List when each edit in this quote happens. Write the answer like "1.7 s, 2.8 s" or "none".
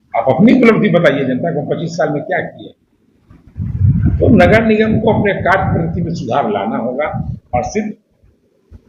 3.7 s